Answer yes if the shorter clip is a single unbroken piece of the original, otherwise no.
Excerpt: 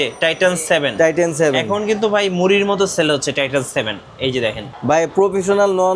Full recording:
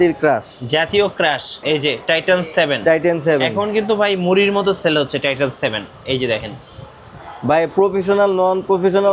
no